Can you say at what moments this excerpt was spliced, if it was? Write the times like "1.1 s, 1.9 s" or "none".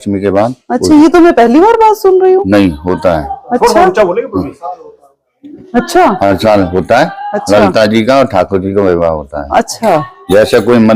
none